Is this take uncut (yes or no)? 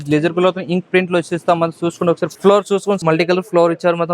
no